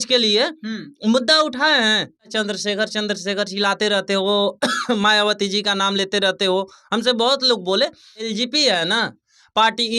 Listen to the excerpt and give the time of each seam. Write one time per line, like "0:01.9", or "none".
0:02.3
0:08.3